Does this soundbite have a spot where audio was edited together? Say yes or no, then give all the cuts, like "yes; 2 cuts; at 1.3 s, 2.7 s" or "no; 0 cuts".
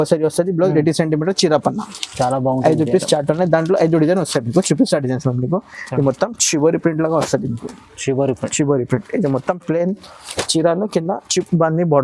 no; 0 cuts